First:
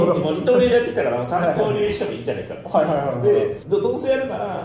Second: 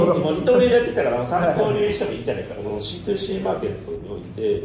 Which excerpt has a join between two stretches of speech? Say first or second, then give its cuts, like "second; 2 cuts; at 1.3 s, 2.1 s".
second; 1 cut; at 2.6 s